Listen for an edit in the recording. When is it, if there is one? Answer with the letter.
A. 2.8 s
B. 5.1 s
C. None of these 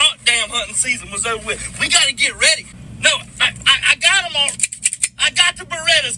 A